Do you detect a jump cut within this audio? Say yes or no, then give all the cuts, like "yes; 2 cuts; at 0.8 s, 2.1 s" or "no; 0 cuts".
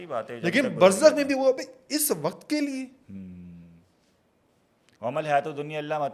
no; 0 cuts